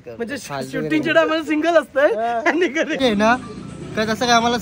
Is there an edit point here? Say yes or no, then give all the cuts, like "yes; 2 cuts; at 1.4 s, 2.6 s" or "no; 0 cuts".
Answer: yes; 1 cut; at 3.0 s